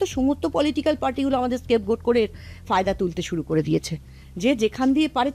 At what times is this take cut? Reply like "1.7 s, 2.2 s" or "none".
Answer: none